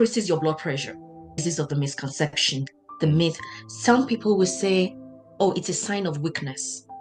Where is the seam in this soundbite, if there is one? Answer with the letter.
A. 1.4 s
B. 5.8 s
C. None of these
A